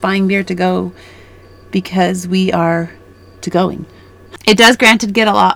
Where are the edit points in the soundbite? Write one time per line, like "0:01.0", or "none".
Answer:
0:04.3